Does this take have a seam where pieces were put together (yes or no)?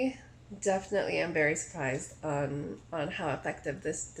no